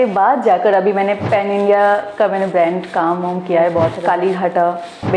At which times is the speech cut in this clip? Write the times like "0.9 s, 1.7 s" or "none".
1.2 s, 4.0 s